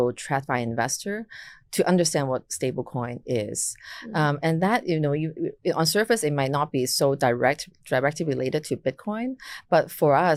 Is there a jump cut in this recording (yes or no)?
no